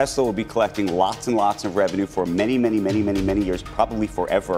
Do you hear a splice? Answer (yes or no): no